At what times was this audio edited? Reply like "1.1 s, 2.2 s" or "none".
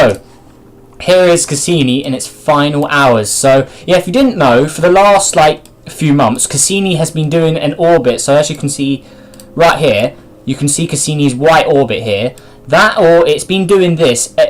2.7 s

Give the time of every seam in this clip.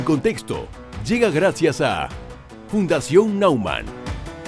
none

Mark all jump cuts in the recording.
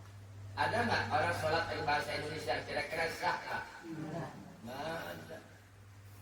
none

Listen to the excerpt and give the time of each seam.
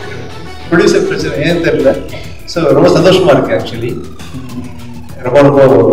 none

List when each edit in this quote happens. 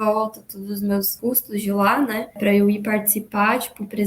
1.2 s, 2.4 s

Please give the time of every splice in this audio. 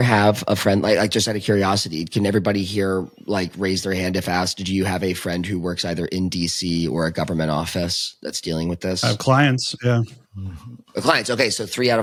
none

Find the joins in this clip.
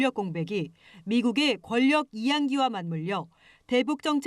none

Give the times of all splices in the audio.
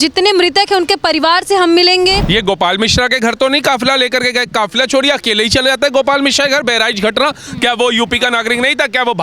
2.2 s

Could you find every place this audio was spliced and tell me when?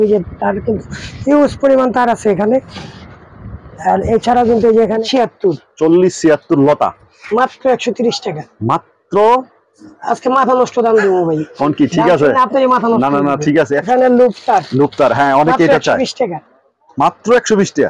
5.0 s, 13.9 s

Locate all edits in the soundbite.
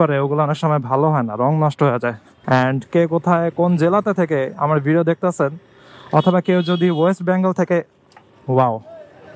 2.2 s

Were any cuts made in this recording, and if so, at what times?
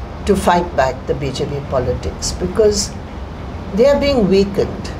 none

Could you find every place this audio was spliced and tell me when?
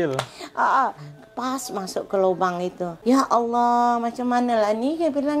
2.9 s

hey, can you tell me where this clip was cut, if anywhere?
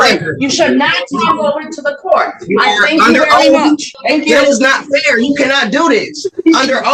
3.9 s

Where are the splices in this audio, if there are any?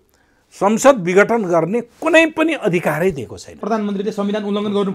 3.6 s

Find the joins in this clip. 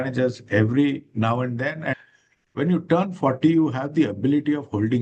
1.9 s

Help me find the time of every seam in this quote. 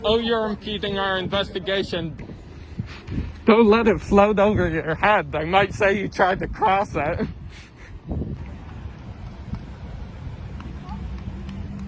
2.1 s

